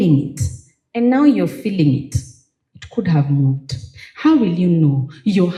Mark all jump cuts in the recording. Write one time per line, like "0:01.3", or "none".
none